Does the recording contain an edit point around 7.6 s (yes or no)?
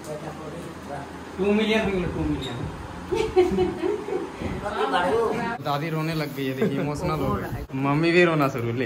yes